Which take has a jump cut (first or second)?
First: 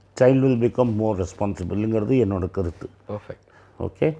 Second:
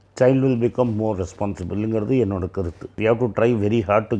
second